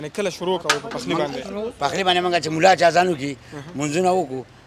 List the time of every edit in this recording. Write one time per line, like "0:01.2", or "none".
none